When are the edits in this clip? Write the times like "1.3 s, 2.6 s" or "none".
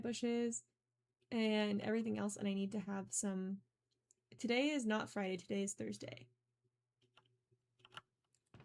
3.1 s